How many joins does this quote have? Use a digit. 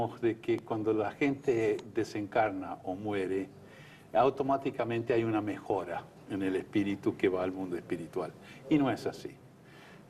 0